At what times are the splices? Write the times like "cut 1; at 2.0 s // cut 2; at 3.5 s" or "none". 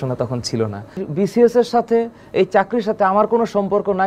cut 1; at 1.0 s